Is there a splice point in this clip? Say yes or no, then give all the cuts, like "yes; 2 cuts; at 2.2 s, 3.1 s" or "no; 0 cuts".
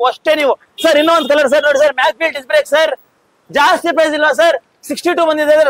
no; 0 cuts